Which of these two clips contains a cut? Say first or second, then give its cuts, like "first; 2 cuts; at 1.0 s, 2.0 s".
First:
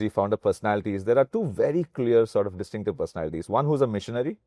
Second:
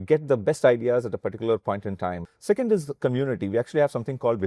second; 1 cut; at 2.2 s